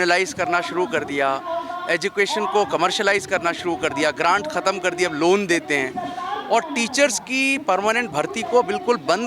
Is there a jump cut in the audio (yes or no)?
no